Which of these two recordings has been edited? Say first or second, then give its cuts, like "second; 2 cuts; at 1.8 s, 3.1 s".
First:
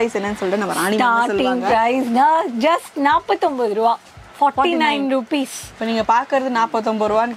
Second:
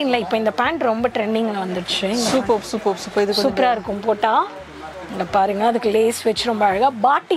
first; 1 cut; at 5.7 s